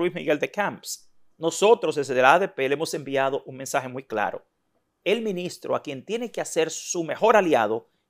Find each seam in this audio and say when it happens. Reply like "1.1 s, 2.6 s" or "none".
none